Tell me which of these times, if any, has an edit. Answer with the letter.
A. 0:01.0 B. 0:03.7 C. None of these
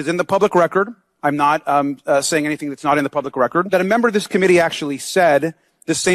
B